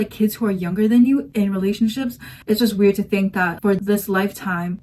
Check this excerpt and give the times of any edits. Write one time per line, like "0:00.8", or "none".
0:02.3
0:03.8